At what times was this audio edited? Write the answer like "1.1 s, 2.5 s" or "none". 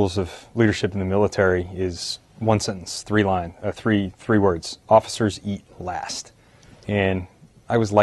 1.6 s